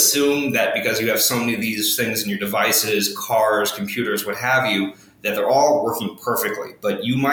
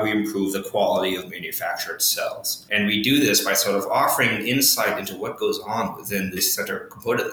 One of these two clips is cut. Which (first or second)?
second